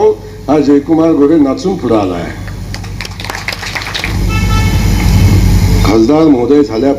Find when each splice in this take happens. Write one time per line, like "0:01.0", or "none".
0:04.1